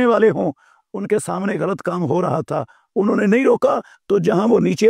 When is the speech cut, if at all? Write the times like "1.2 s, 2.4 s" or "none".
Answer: none